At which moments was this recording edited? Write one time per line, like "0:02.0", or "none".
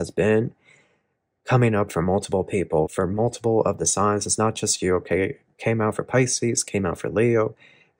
none